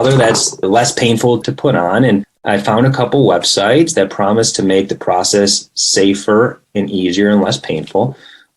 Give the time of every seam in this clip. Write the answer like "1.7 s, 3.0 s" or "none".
1.4 s, 2.3 s